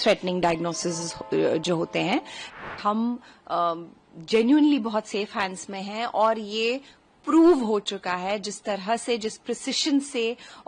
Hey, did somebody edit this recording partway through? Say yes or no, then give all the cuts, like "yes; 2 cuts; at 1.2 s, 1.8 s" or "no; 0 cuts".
yes; 1 cut; at 2.5 s